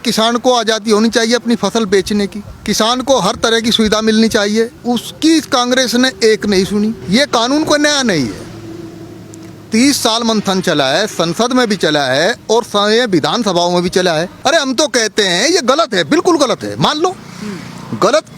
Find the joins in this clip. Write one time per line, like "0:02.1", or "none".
0:02.5
0:04.8
0:07.0
0:14.3